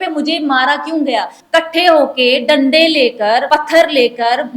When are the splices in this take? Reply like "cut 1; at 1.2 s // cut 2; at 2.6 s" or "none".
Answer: cut 1; at 1.4 s // cut 2; at 3.4 s